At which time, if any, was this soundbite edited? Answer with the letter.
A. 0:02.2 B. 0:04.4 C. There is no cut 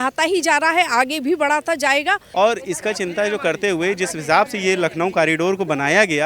A